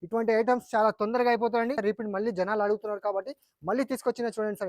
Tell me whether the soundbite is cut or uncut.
cut